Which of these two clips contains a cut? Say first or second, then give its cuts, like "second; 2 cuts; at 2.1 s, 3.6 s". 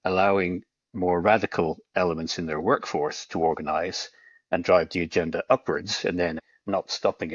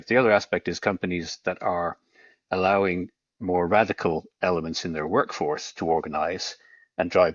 first; 1 cut; at 6.4 s